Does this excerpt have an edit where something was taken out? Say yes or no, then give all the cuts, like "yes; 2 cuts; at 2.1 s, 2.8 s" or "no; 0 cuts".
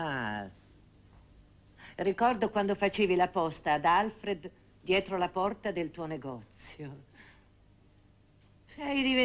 no; 0 cuts